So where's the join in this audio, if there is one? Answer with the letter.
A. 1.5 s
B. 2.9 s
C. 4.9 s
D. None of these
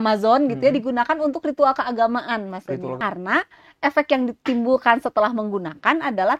B